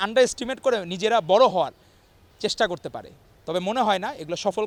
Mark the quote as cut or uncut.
uncut